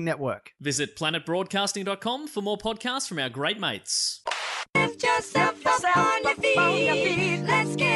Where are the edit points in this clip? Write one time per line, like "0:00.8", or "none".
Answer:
0:04.6